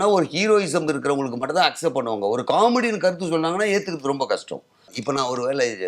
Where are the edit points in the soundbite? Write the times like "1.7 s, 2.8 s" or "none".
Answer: 4.9 s